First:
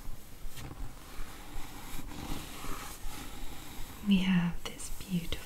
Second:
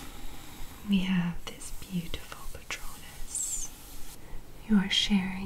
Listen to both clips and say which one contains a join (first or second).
second